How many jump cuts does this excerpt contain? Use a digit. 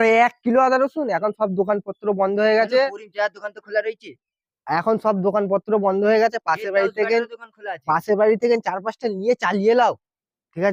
0